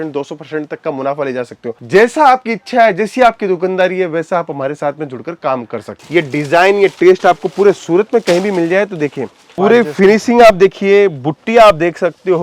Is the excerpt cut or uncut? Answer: cut